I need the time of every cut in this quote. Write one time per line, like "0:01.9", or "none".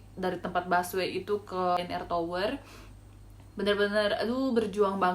0:01.8